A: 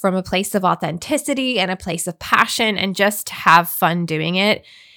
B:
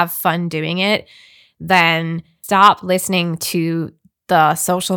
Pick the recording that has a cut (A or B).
B